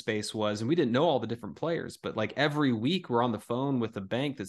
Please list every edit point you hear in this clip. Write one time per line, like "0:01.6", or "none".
none